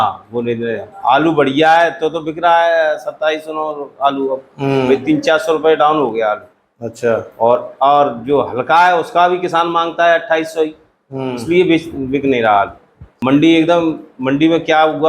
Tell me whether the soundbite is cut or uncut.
cut